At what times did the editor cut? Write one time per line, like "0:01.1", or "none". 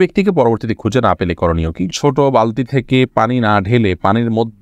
0:01.9